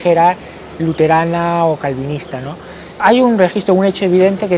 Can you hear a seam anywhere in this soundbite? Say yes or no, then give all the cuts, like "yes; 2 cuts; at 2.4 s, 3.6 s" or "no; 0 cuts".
yes; 1 cut; at 3.0 s